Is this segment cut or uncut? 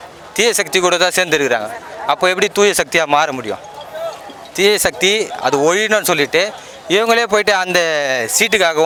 uncut